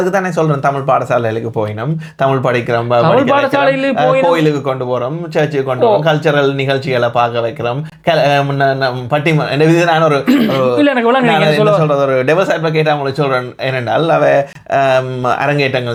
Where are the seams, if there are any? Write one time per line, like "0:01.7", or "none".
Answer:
none